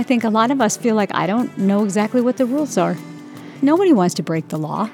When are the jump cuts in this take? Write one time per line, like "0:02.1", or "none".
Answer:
0:03.4